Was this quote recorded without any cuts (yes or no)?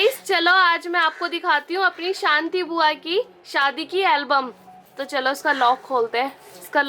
yes